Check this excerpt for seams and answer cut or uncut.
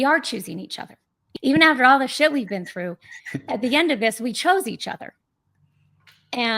cut